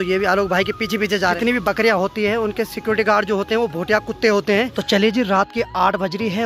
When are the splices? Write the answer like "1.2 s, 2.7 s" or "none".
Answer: 1.4 s, 4.8 s